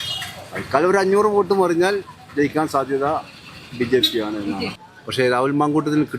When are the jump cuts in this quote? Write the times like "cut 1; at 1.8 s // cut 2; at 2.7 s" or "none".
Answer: cut 1; at 4.7 s